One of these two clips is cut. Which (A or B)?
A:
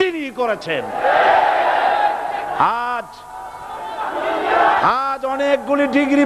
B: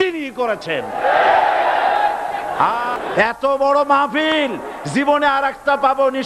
B